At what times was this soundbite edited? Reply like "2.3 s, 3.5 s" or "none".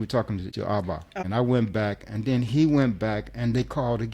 1.0 s